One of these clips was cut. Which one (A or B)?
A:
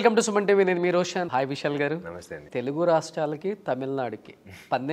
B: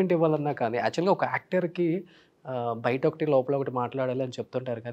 A